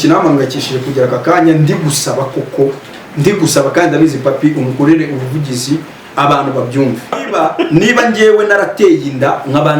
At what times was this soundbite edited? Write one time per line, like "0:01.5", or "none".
0:07.3